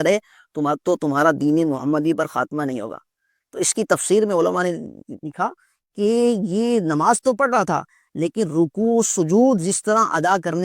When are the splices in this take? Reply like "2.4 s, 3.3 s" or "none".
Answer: none